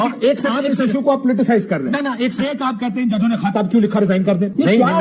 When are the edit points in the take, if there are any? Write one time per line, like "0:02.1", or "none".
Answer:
none